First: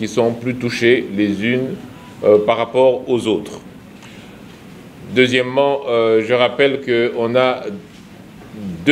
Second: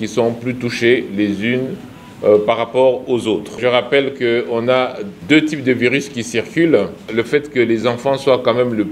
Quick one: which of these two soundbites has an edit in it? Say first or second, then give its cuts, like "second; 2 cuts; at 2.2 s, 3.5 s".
second; 3 cuts; at 3.6 s, 5.1 s, 7.0 s